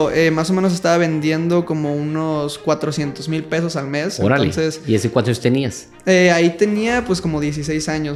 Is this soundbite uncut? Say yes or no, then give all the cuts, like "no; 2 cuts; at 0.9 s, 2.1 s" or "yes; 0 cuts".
yes; 0 cuts